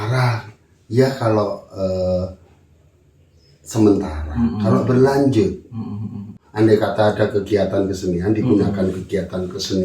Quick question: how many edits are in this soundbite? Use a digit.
1